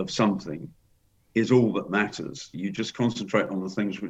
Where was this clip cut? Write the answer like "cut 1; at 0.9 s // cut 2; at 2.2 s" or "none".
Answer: cut 1; at 2.5 s